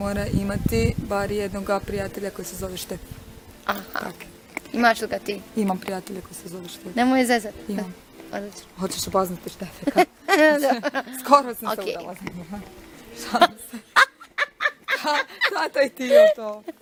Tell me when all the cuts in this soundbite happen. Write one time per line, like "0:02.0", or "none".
none